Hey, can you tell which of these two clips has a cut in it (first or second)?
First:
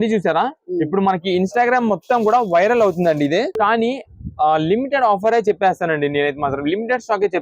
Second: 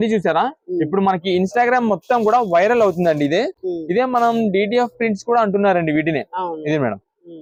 first